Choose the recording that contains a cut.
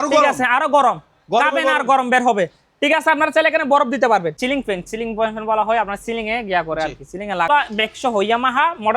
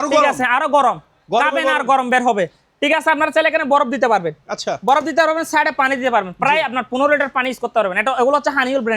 first; 2 cuts; at 4.3 s, 7.5 s

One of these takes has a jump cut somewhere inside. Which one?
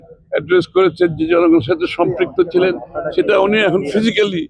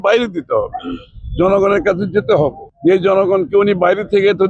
second; 1 cut; at 2.7 s

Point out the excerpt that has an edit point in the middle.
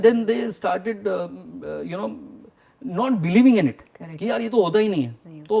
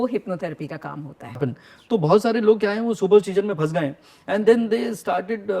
second; 1 cut; at 1.4 s

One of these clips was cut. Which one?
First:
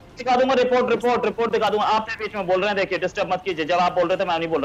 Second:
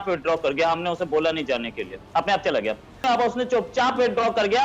second; 1 cut; at 3.0 s

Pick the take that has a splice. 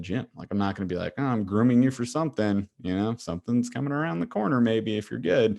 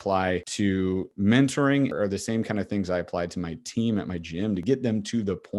second; 3 cuts; at 1.0 s, 1.9 s, 4.6 s

